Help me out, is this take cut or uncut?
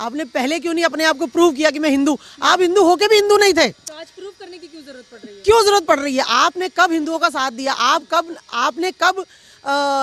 uncut